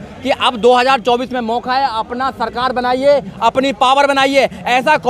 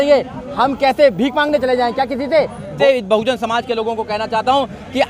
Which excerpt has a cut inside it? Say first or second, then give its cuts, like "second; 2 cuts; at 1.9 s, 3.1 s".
second; 1 cut; at 2.7 s